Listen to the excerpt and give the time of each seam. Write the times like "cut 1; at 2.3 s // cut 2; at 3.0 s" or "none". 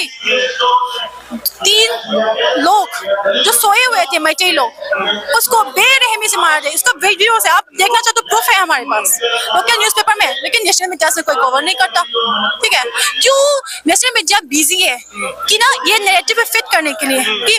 none